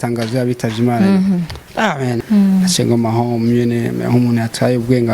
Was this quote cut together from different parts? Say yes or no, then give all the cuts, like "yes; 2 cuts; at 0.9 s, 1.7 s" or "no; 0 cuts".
yes; 1 cut; at 2.2 s